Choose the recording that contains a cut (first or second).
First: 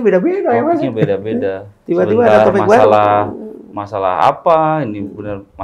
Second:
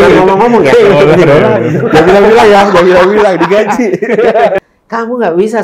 second